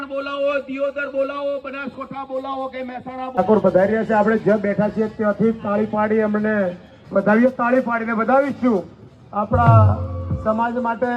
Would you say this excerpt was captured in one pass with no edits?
no; 1 cut; at 3.4 s

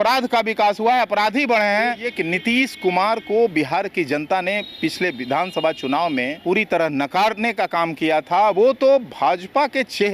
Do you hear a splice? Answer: yes; 2 cuts; at 2.1 s, 6.3 s

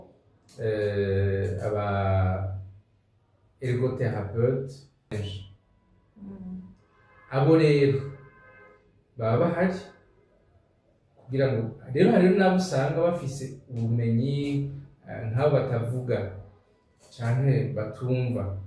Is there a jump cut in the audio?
yes; 1 cut; at 5.2 s

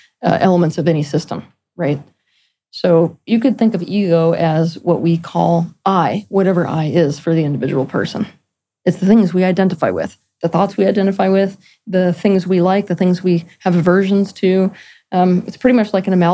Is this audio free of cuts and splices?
yes; 0 cuts

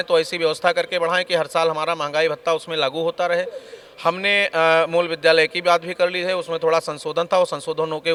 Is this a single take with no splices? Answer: yes; 0 cuts

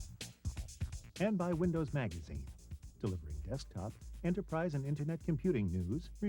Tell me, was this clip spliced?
yes; 1 cut; at 1.0 s

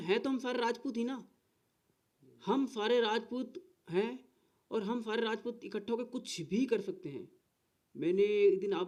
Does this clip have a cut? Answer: no; 0 cuts

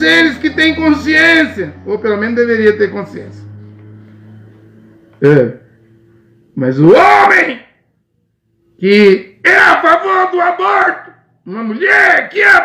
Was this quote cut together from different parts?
no; 0 cuts

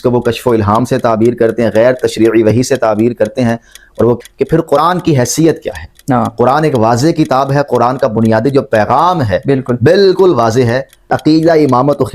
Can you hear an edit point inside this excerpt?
yes; 2 cuts; at 4.2 s, 11.2 s

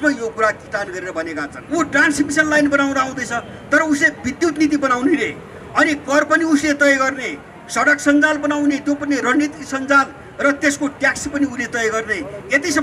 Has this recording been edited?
yes; 1 cut; at 1.5 s

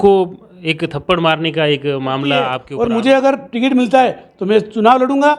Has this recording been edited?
yes; 1 cut; at 2.6 s

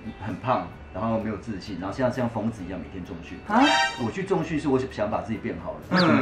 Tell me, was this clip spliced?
no; 0 cuts

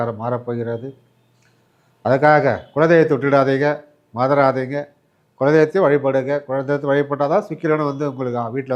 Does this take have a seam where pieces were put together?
no; 0 cuts

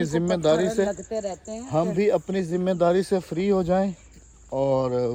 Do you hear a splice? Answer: no; 0 cuts

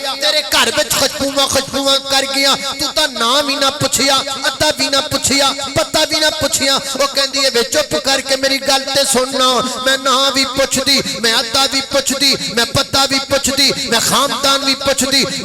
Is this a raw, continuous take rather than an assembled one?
yes; 0 cuts

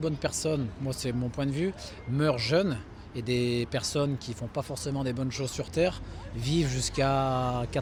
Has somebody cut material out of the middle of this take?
no; 0 cuts

